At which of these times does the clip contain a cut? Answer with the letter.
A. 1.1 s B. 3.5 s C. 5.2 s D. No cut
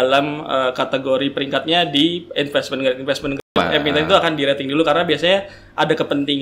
B